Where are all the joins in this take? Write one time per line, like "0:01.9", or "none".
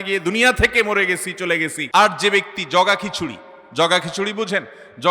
0:01.8